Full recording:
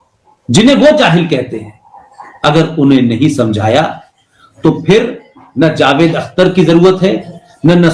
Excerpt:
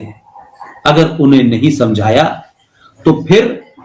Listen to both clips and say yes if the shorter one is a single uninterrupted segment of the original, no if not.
yes